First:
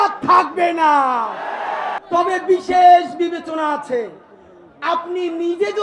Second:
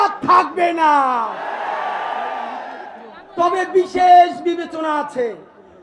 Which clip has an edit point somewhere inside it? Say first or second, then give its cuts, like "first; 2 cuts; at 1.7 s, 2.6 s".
first; 1 cut; at 2.0 s